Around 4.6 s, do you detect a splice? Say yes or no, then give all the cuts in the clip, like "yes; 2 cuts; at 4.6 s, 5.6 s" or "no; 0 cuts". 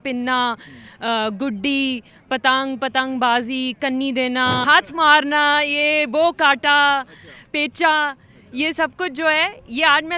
yes; 1 cut; at 4.6 s